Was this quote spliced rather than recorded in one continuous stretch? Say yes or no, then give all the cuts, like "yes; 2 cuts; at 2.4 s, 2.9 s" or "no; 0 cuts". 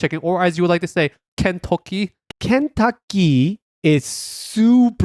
yes; 3 cuts; at 1.2 s, 2.3 s, 3.7 s